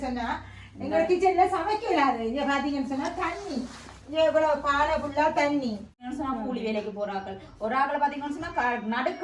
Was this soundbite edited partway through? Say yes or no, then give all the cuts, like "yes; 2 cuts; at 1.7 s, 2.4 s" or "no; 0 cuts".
yes; 1 cut; at 6.0 s